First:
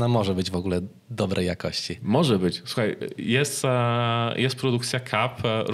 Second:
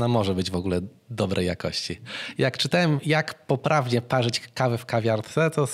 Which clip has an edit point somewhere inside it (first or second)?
second